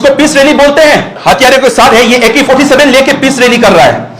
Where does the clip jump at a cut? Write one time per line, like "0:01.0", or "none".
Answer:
0:01.1